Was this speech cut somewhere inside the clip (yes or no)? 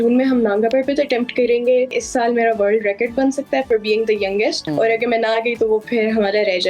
yes